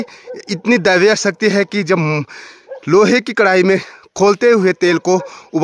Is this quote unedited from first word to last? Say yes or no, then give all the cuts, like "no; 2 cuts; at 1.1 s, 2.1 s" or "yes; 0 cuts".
yes; 0 cuts